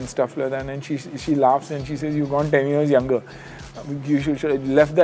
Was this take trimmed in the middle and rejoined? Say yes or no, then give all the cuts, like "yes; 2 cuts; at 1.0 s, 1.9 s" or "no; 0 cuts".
no; 0 cuts